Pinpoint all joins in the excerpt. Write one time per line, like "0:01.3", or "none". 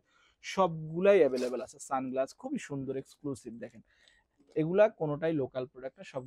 none

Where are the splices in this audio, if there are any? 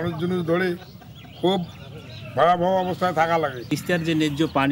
0:03.7

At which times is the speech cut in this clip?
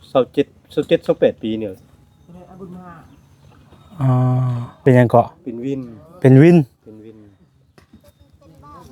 0:04.8

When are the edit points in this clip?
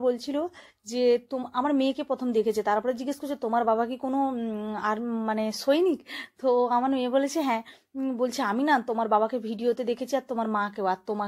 none

